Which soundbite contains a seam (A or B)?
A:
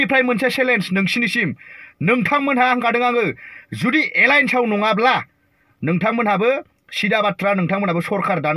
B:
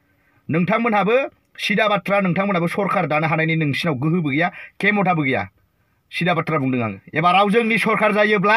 B